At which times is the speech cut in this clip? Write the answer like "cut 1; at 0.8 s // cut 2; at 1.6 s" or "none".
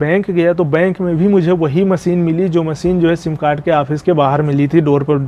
none